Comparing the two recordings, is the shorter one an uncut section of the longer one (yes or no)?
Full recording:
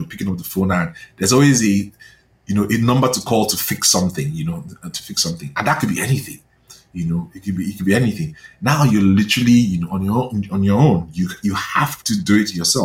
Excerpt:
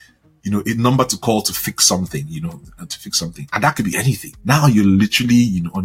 no